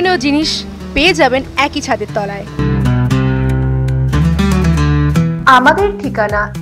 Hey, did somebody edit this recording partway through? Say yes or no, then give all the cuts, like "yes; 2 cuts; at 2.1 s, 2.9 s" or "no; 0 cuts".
no; 0 cuts